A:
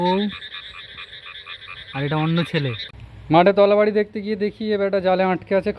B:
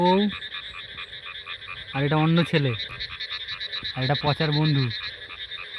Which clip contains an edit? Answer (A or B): A